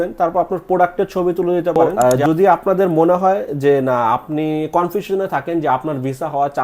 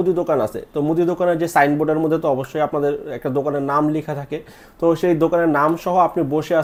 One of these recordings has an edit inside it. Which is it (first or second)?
first